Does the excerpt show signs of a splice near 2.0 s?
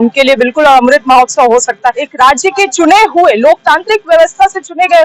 yes; 1 cut; at 2.0 s

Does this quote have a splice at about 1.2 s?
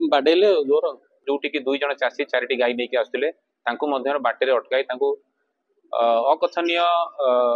yes; 1 cut; at 1.2 s

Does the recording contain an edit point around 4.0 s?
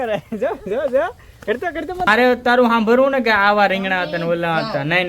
no; 1 cut; at 2.1 s

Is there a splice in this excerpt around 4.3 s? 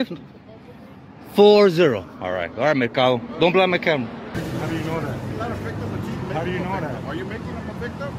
yes; 1 cut; at 4.3 s

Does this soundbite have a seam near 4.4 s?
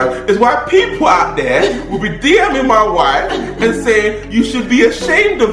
no; 0 cuts

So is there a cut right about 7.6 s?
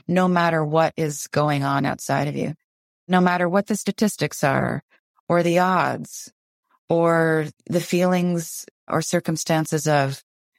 yes; 3 cuts; at 2.7 s, 7.6 s, 8.9 s

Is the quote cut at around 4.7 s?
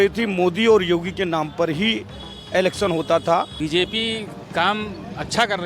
no; 1 cut; at 3.5 s

